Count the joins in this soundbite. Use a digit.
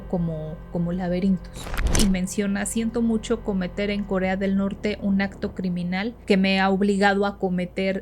2